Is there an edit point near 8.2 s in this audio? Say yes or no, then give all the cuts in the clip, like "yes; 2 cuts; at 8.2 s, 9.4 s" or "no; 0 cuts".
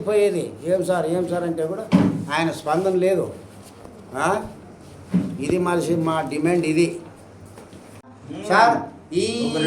yes; 1 cut; at 8.2 s